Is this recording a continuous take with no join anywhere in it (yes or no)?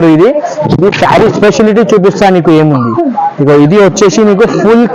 yes